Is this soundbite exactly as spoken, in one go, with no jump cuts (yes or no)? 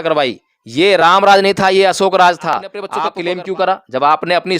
no